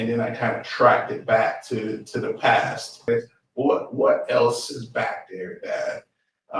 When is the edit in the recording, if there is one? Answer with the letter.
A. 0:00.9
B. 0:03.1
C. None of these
B